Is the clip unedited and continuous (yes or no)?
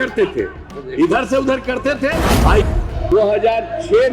no